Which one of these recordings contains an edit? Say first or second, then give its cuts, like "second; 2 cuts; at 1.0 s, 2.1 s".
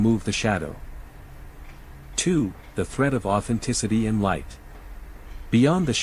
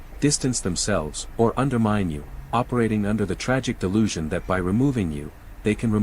second; 1 cut; at 1.2 s